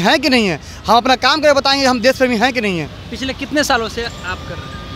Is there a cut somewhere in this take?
no; 0 cuts

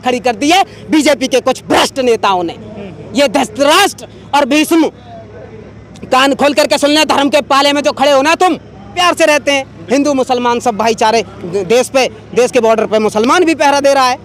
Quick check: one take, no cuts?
no; 1 cut; at 8.9 s

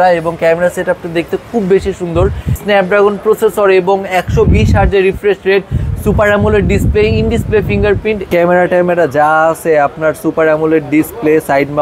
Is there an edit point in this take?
yes; 2 cuts; at 2.6 s, 8.2 s

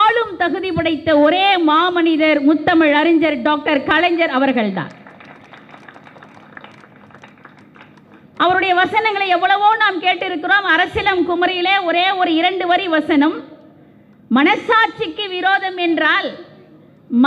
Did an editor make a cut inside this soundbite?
no; 0 cuts

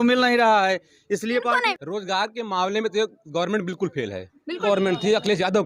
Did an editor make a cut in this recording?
yes; 2 cuts; at 1.7 s, 4.6 s

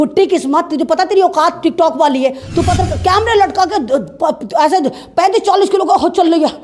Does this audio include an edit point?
no; 0 cuts

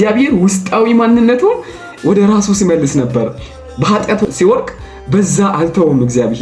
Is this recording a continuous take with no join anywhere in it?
yes; 0 cuts

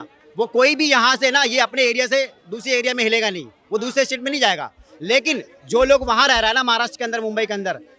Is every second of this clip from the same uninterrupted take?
yes; 0 cuts

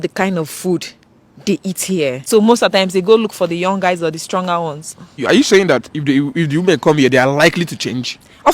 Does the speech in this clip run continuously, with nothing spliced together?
no; 2 cuts; at 2.2 s, 5.2 s

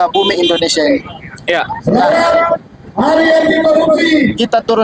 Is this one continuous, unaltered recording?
yes; 0 cuts

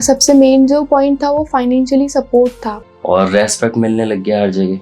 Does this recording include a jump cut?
yes; 1 cut; at 2.7 s

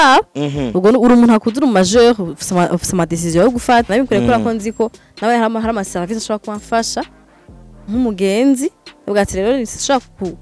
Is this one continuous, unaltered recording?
no; 1 cut; at 3.9 s

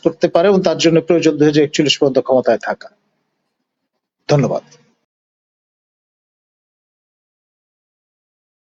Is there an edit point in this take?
no; 0 cuts

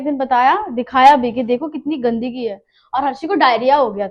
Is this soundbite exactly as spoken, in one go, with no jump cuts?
yes; 0 cuts

